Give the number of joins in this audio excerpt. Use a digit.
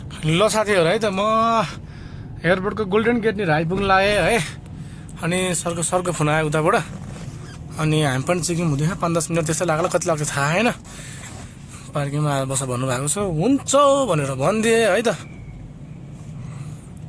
0